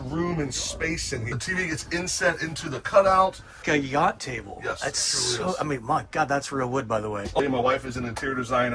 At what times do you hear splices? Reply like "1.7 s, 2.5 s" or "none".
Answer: 1.3 s, 3.6 s, 7.4 s